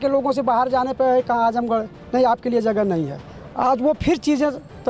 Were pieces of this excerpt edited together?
no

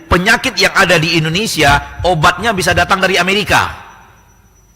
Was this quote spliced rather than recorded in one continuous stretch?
no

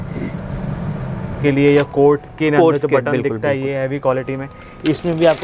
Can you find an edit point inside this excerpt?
yes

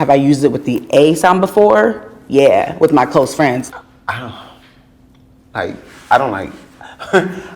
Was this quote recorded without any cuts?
no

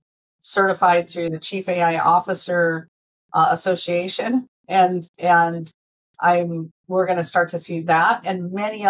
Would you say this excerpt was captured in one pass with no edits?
yes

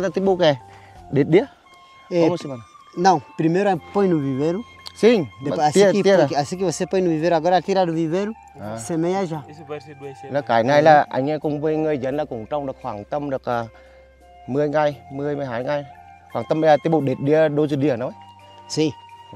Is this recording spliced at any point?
no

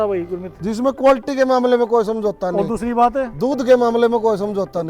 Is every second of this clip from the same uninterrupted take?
yes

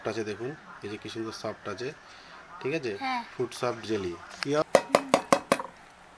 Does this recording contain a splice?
yes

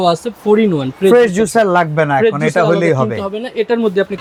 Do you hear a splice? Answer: no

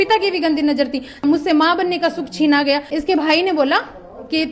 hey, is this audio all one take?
no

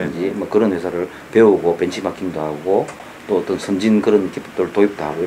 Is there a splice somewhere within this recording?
no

